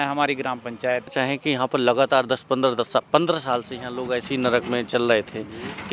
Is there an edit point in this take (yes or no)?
yes